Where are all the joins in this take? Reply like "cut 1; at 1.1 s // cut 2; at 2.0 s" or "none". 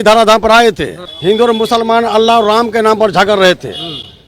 cut 1; at 1.0 s